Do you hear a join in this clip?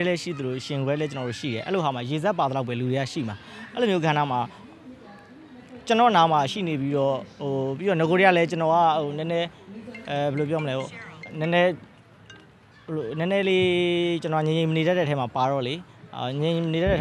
no; 0 cuts

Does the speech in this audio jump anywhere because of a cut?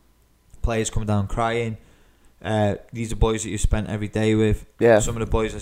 no; 0 cuts

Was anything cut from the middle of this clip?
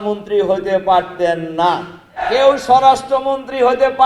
yes; 1 cut; at 2.2 s

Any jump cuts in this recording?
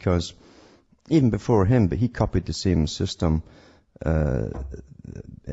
yes; 1 cut; at 3.3 s

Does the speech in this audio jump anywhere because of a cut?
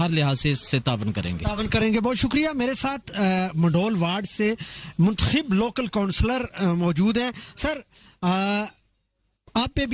no; 0 cuts

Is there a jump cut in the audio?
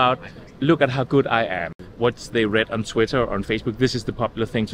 yes; 1 cut; at 1.8 s

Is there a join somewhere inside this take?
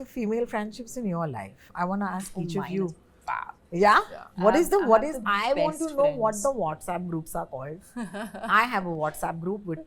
no; 0 cuts

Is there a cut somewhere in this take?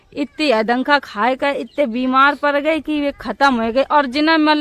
no; 0 cuts

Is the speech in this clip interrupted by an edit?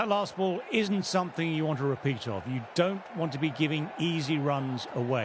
no; 0 cuts

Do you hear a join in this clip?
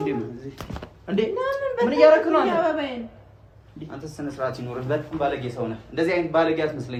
no; 0 cuts

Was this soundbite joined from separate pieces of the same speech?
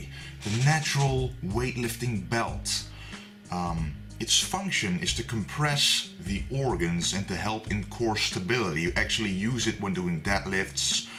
no; 0 cuts

